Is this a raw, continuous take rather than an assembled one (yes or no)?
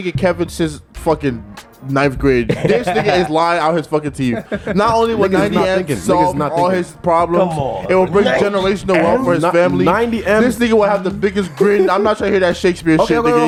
yes